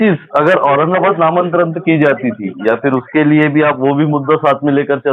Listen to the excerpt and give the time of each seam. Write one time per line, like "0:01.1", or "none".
none